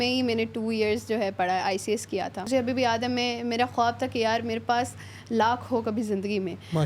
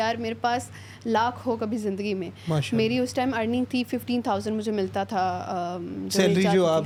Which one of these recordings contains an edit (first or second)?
first